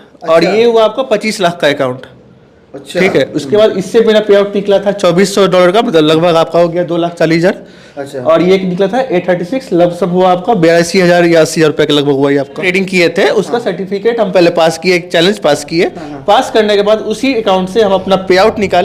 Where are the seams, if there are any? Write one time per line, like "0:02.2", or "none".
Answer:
0:12.6